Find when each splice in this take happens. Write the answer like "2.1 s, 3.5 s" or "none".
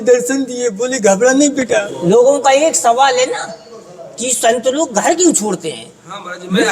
1.9 s